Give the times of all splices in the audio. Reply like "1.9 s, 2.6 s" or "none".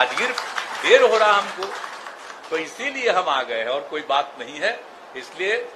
none

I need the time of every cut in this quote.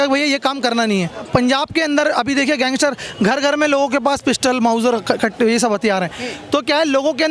1.2 s

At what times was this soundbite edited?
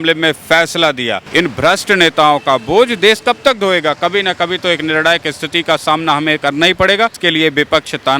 1.2 s, 7.2 s

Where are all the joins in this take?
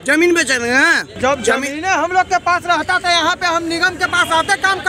1.1 s

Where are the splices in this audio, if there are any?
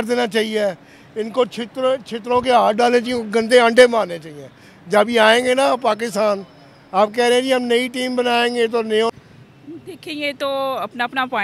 9.1 s

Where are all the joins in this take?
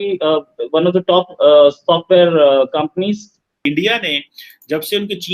3.5 s

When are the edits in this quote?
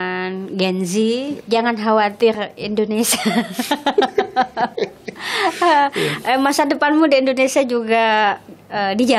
1.4 s

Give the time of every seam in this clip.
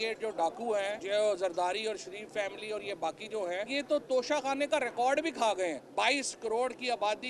1.0 s, 3.7 s, 5.8 s

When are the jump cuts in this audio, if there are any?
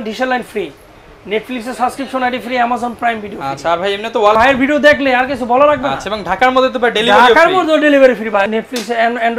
4.3 s, 8.5 s

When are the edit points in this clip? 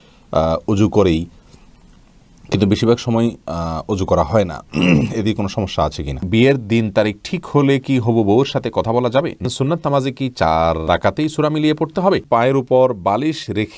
6.2 s, 9.4 s, 10.9 s, 12.2 s

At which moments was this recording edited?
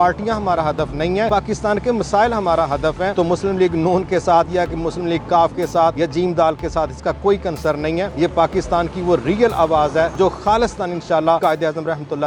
1.3 s, 3.1 s, 5.9 s, 8.1 s, 10.1 s, 11.4 s

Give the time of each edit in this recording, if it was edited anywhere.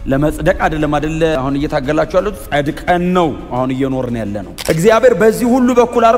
1.3 s, 4.5 s

